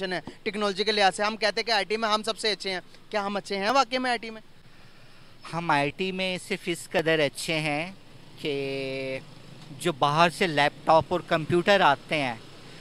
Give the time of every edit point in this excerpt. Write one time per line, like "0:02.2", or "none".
none